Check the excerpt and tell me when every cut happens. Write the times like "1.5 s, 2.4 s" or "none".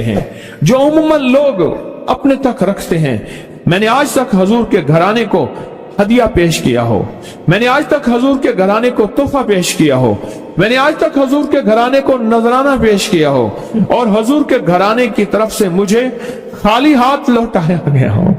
3.3 s

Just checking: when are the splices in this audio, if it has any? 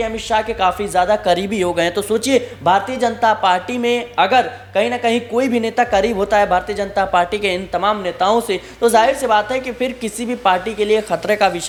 none

